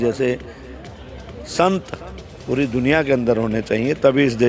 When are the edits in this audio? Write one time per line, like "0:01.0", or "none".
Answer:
none